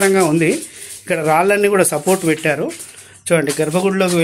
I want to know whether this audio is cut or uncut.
uncut